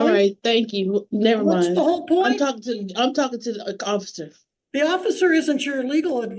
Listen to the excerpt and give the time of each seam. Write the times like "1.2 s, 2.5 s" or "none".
none